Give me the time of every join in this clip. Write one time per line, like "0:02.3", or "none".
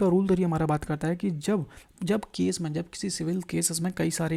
none

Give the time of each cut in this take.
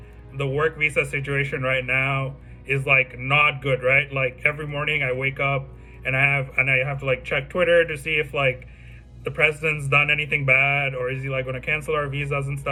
none

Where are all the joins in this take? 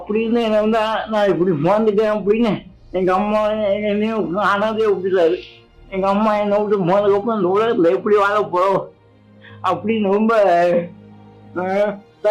none

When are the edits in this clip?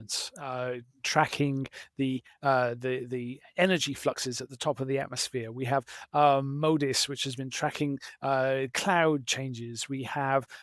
none

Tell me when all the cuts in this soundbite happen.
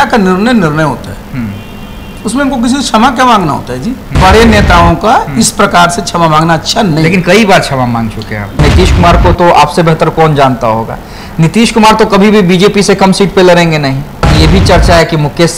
0:04.0
0:08.6
0:14.3

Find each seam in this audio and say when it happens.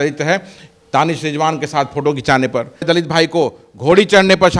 0:02.8

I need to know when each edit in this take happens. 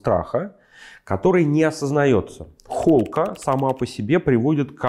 0:02.7

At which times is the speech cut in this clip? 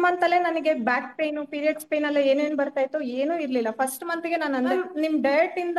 0:04.7

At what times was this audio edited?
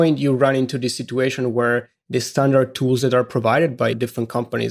none

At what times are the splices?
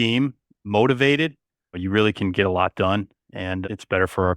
0:01.8
0:03.6

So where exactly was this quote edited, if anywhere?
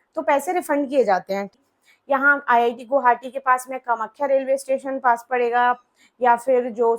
0:01.5

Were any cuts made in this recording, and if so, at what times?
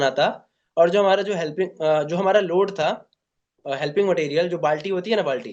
none

